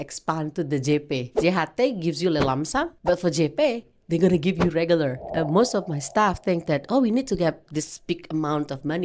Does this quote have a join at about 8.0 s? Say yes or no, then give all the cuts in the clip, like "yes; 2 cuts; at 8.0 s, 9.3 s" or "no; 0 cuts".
no; 3 cuts; at 1.4 s, 2.9 s, 5.3 s